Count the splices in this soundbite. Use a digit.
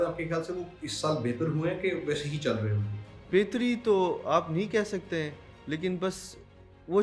1